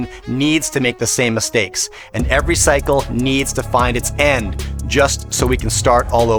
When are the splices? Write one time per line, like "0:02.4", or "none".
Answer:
none